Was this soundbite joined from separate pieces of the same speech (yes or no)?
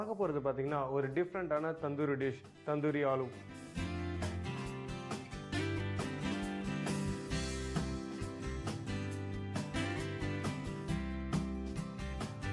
yes